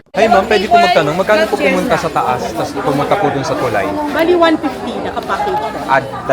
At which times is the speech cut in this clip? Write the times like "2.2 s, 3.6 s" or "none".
none